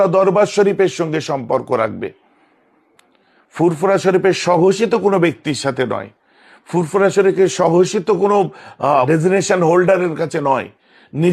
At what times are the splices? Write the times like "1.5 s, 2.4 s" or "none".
9.1 s